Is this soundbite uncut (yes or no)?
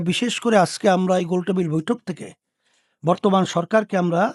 yes